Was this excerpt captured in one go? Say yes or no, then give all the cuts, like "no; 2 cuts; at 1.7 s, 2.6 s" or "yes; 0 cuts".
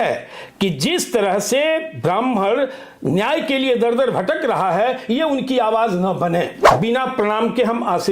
no; 1 cut; at 6.7 s